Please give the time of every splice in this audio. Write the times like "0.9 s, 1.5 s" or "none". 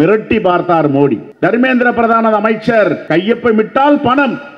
1.3 s, 3.0 s

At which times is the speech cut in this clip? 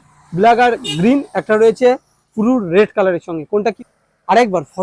3.8 s

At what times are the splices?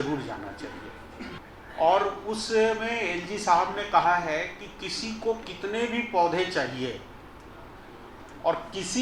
1.5 s

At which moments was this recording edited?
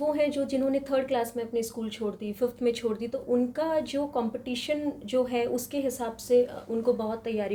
none

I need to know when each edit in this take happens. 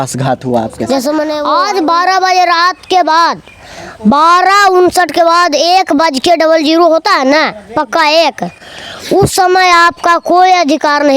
1.4 s

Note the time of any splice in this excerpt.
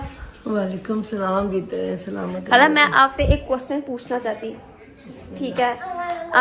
none

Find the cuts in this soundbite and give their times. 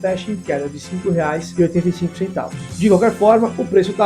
1.5 s, 2.7 s

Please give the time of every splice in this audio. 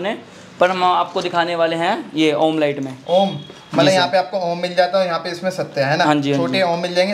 none

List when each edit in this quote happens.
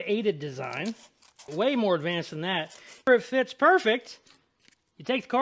1.5 s, 3.0 s

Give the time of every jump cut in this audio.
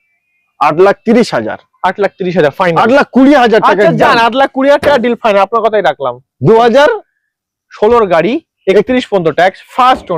none

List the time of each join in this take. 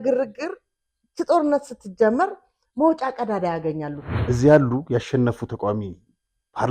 4.1 s

